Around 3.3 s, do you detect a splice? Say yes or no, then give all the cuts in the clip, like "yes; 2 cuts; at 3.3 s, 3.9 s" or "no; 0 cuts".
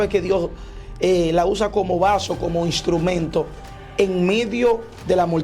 no; 0 cuts